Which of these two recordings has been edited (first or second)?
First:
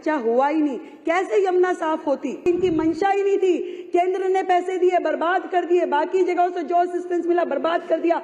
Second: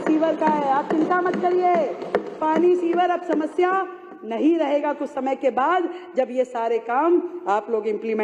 first